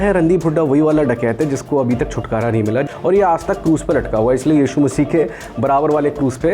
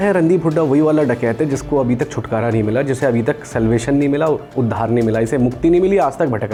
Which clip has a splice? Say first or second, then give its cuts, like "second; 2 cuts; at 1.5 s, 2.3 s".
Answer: first; 1 cut; at 2.9 s